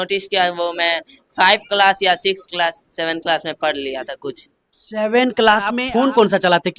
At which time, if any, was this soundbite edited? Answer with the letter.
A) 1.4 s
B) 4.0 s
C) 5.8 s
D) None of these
C